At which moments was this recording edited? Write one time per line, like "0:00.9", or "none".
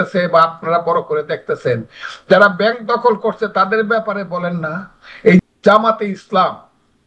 0:05.4